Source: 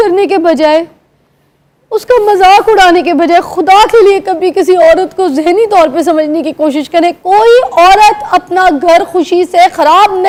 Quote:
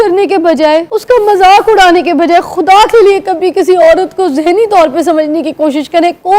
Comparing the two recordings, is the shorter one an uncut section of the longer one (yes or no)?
no